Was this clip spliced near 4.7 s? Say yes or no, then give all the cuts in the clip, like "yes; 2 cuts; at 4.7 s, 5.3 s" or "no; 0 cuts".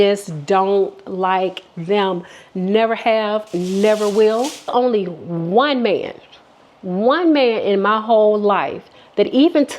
yes; 1 cut; at 4.7 s